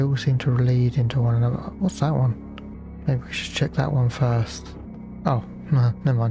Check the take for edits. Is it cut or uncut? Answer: cut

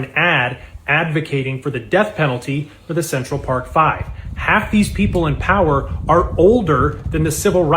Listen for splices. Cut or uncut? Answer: uncut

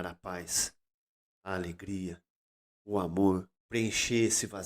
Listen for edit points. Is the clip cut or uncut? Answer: cut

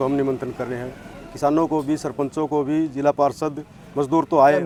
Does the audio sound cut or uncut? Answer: uncut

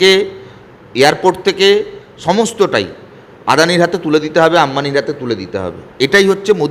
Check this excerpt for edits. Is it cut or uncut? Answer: uncut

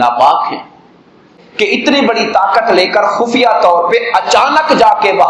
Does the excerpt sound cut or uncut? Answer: cut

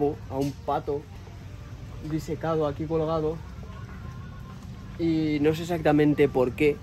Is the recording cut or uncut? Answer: uncut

